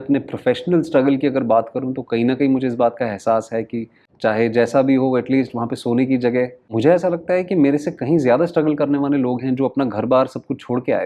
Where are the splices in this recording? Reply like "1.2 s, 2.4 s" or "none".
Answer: 4.0 s, 6.7 s